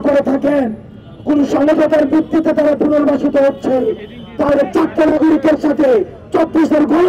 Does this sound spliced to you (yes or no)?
no